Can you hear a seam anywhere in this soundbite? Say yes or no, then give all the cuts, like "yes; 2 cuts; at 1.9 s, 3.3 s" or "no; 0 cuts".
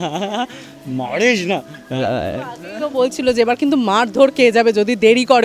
no; 0 cuts